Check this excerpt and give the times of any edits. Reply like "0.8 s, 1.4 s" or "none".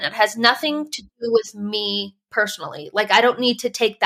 none